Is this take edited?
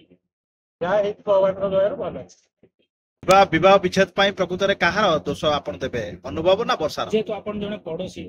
yes; 1 cut; at 3.2 s

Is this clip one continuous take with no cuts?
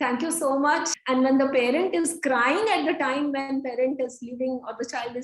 no; 1 cut; at 0.9 s

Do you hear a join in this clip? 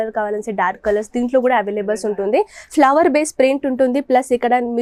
no; 0 cuts

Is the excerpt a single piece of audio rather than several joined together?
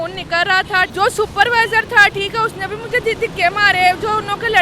no; 1 cut; at 0.9 s

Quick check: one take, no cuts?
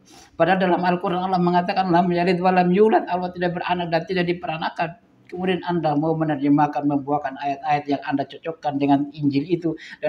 yes; 0 cuts

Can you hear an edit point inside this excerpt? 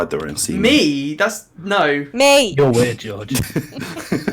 no; 0 cuts

